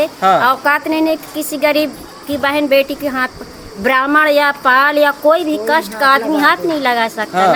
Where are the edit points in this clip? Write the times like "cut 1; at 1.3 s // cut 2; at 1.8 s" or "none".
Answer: none